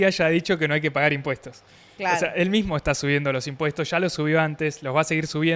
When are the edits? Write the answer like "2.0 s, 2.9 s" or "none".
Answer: none